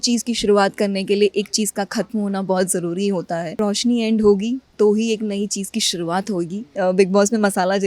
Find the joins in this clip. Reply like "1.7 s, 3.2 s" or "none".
3.6 s, 6.6 s